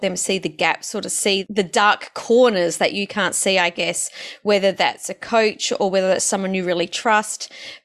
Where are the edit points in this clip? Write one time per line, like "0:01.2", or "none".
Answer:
0:01.4